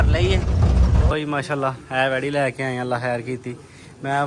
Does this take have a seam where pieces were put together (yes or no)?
yes